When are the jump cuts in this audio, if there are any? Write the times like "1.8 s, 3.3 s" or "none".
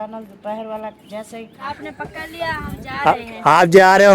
1.7 s